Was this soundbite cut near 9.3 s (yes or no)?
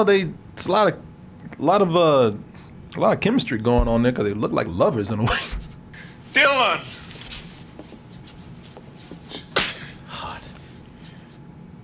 yes